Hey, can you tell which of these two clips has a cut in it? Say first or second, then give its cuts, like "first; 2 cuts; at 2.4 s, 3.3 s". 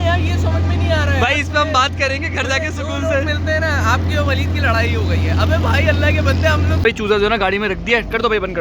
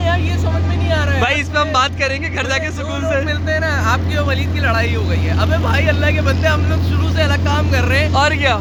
first; 1 cut; at 6.8 s